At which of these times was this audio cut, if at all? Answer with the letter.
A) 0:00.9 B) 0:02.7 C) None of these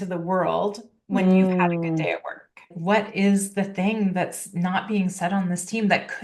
B